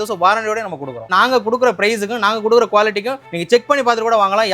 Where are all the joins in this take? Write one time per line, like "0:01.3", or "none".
0:01.0